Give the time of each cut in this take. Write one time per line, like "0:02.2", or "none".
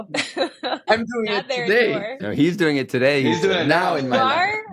0:00.8
0:02.3